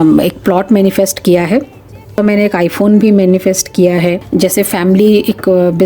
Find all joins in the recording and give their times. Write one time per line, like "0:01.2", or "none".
0:02.2
0:04.2